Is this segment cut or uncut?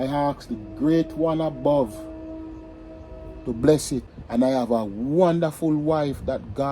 cut